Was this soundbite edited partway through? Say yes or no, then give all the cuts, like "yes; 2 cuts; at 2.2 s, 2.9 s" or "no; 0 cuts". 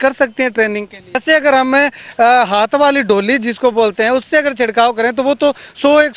yes; 1 cut; at 1.2 s